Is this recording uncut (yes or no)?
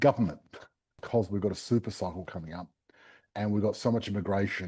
no